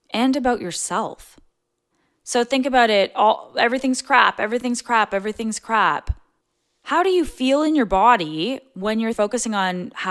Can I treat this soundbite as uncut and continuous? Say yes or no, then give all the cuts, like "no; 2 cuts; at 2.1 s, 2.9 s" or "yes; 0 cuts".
no; 1 cut; at 9.1 s